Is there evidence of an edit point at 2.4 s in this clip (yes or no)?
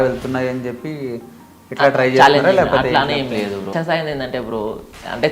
no